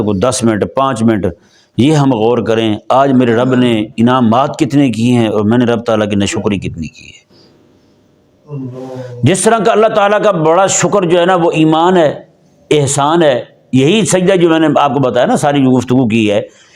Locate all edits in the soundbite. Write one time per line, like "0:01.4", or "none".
none

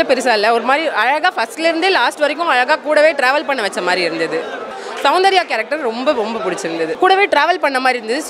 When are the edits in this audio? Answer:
0:04.6
0:06.9

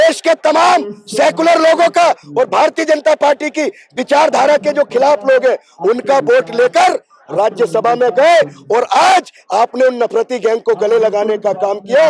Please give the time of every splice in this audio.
none

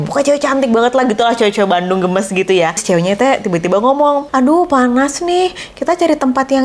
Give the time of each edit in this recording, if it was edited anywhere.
0:02.8
0:04.3

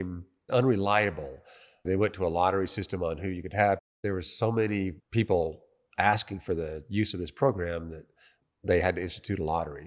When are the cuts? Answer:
0:03.9
0:05.0

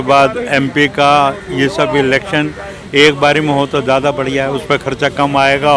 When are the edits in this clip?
none

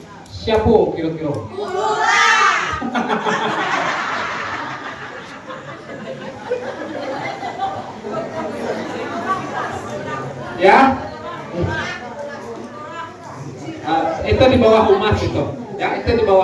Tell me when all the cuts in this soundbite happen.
none

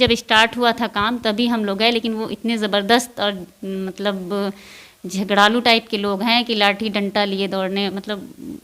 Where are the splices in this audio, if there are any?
none

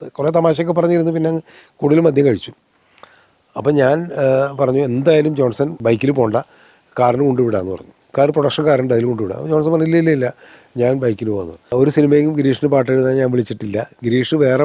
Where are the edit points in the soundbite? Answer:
0:05.8
0:11.7

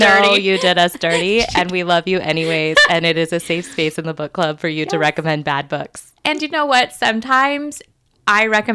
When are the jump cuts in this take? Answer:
none

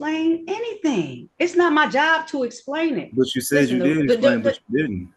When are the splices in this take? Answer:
none

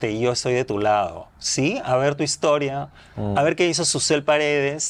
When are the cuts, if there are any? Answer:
none

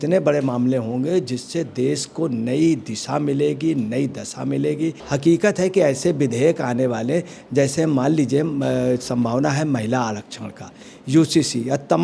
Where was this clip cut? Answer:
0:05.0

